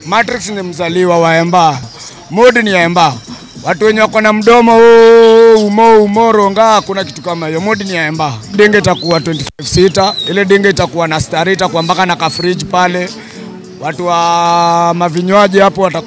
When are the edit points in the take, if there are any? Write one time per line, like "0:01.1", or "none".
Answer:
0:01.9
0:08.6

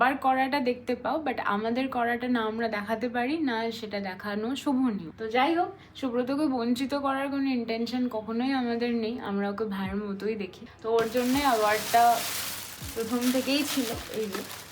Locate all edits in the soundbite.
none

